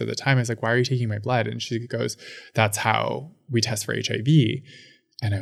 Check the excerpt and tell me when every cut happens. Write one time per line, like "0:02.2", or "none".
none